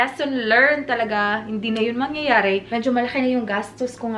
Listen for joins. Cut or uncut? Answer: cut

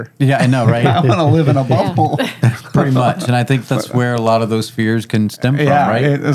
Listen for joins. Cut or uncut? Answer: uncut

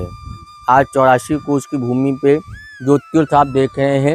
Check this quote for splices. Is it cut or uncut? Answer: uncut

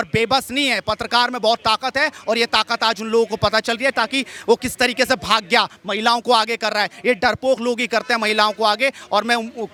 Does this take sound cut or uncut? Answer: uncut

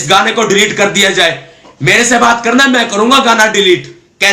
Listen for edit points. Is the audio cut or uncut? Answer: uncut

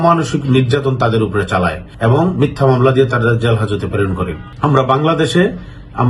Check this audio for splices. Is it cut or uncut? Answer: cut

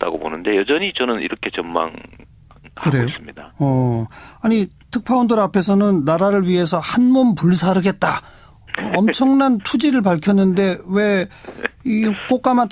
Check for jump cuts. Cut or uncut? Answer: uncut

